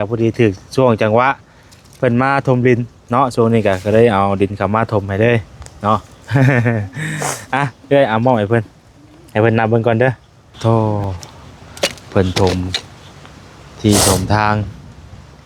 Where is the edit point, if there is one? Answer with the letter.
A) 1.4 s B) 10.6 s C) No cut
B